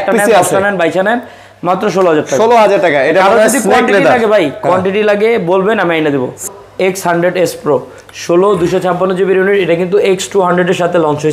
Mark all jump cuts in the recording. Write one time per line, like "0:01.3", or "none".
0:06.4